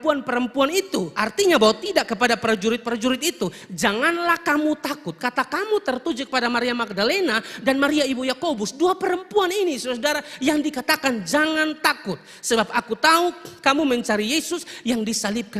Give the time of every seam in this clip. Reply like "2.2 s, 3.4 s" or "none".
1.1 s